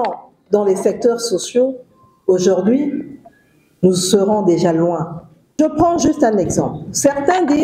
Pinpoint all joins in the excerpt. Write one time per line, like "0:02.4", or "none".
0:05.6